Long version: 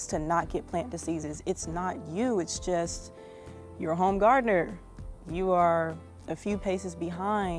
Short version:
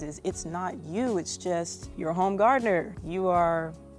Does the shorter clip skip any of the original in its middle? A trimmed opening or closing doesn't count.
yes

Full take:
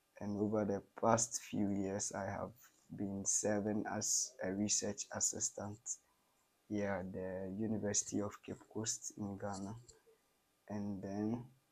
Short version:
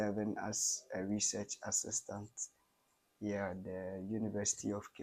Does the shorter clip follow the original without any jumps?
yes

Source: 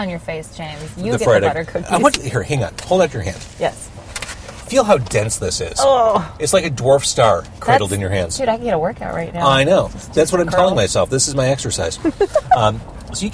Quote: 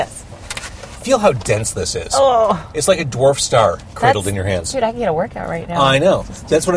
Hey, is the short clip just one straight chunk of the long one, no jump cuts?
yes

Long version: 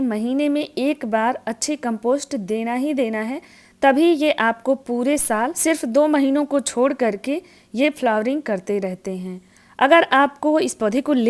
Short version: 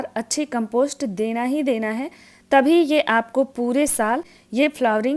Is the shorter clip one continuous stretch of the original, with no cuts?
no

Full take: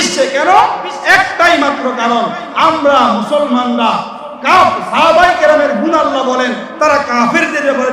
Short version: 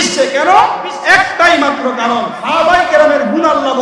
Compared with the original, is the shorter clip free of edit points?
no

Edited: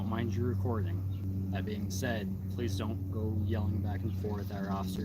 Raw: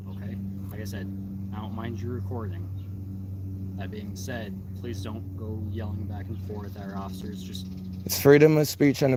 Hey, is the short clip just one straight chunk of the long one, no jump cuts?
no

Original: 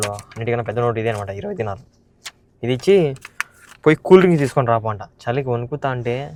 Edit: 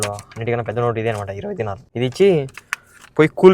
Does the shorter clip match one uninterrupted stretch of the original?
no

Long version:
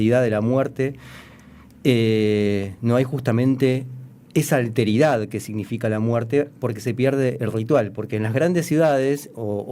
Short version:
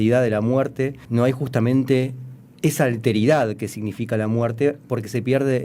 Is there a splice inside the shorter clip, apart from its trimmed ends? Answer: yes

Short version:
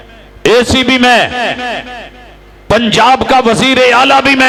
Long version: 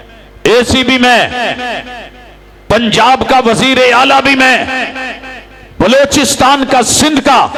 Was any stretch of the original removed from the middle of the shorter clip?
no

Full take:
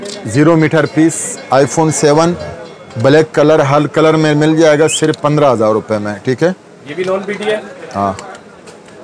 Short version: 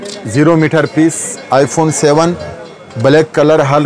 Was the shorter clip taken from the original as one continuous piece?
yes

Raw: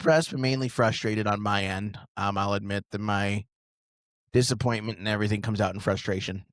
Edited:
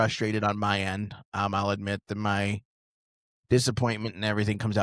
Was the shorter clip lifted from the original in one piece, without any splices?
yes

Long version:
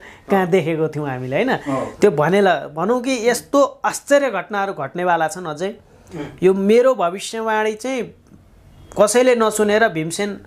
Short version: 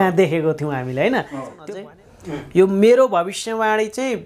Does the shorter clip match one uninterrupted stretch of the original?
no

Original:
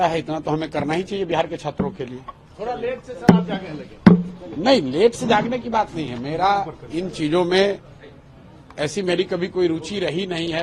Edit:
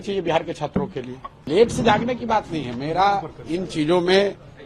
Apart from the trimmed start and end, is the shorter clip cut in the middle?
yes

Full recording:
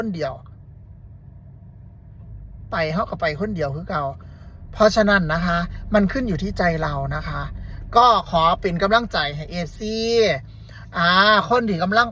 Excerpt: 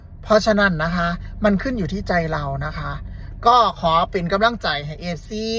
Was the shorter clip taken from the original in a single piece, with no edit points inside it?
yes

